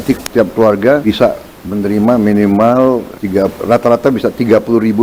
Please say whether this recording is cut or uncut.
cut